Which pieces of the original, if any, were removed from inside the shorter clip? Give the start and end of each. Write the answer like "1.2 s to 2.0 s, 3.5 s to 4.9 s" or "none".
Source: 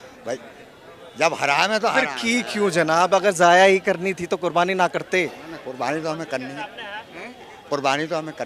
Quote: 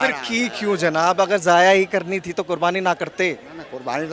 none